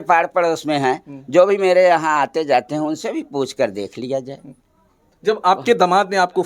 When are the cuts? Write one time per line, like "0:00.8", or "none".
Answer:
none

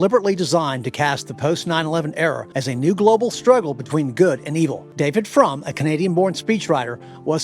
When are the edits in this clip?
0:02.4
0:04.8

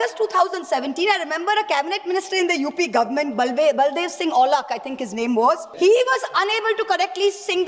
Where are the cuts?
0:05.7

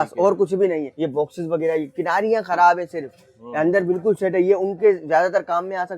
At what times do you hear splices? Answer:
0:00.9

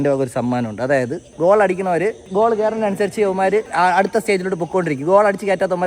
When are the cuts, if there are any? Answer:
0:01.3

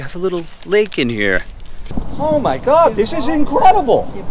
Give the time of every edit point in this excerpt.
0:02.0

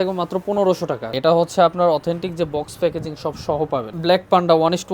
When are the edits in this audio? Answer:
0:01.1
0:03.9

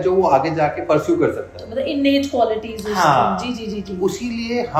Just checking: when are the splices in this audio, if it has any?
none

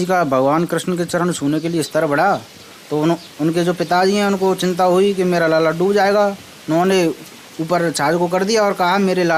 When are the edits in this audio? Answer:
none

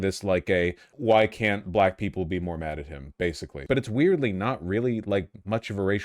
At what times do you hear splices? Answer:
0:03.6

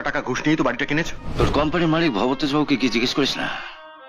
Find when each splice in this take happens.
0:01.2

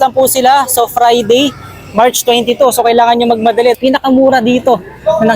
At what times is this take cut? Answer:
0:03.8

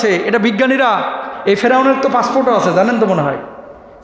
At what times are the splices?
none

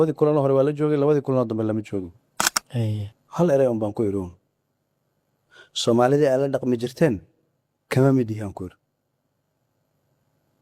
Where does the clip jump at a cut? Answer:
0:03.2

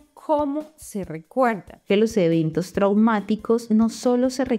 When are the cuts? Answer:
0:01.9

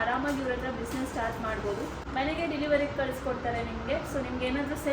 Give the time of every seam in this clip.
0:02.0

